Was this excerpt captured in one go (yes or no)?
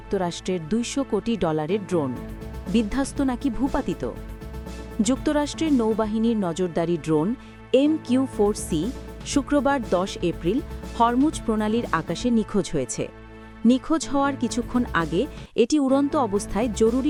yes